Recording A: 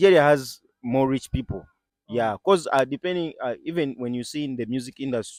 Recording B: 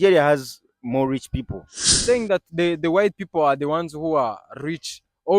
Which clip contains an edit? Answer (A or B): B